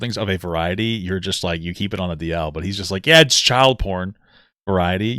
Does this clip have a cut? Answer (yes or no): no